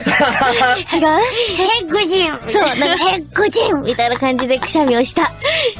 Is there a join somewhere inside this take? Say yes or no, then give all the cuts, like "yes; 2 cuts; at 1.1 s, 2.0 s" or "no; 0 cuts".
yes; 1 cut; at 2.1 s